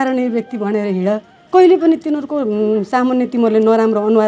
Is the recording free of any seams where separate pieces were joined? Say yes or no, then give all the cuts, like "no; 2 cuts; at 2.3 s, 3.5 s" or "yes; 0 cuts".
yes; 0 cuts